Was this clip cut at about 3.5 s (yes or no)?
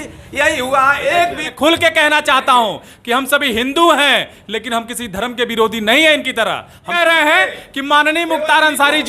no